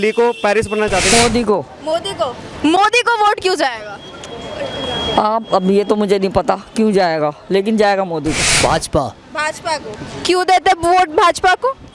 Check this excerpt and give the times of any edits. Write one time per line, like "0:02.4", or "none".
0:01.1
0:08.5